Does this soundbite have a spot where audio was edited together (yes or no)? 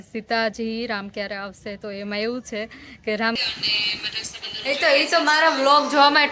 yes